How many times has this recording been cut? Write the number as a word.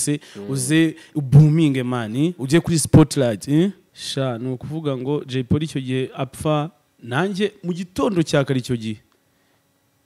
one